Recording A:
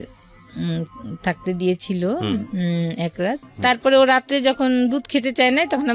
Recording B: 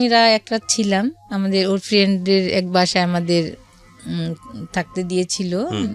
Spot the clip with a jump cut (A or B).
A